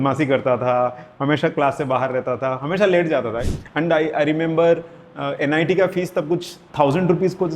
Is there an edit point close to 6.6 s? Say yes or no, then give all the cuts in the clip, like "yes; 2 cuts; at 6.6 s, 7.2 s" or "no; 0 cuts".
yes; 2 cuts; at 3.5 s, 6.6 s